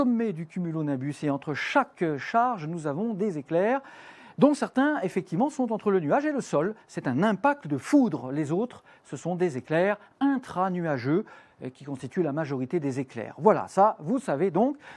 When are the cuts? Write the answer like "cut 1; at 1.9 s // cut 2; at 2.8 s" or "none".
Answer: none